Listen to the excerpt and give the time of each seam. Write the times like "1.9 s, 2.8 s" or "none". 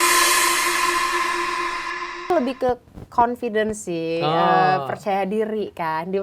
2.2 s